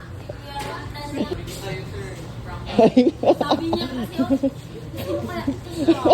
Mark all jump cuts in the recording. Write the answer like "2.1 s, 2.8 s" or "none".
1.3 s